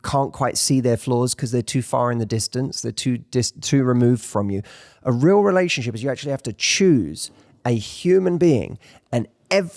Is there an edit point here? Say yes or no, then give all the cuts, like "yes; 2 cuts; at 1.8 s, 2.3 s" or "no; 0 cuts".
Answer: no; 0 cuts